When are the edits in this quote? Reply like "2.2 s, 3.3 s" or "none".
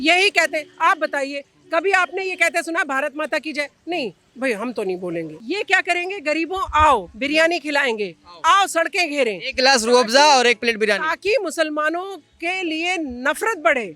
5.3 s